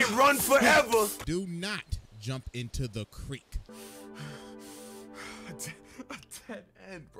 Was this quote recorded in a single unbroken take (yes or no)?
no